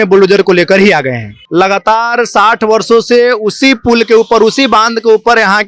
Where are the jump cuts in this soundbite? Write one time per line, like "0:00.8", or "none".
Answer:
0:01.3